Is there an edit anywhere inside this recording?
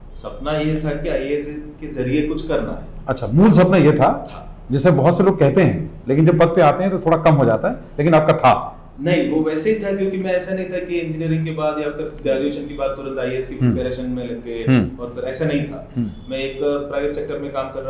no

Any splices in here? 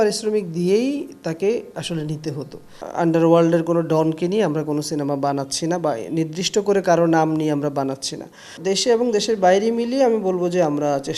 yes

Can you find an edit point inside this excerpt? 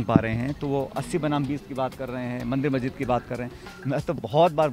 yes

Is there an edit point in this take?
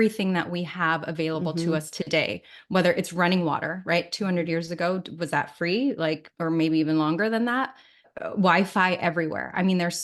yes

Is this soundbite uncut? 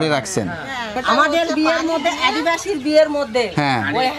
no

